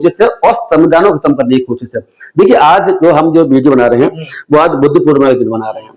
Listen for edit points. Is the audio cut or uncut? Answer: uncut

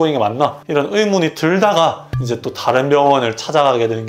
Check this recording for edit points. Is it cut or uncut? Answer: uncut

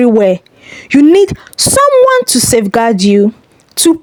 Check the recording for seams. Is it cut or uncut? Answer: uncut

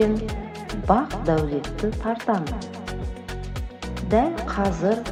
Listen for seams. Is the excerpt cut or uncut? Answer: uncut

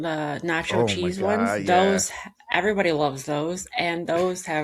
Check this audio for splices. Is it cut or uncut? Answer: uncut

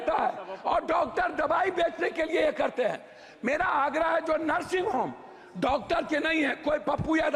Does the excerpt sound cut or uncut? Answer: uncut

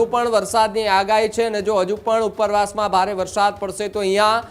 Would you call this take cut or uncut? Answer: uncut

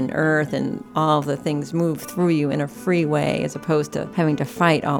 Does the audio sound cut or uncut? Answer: cut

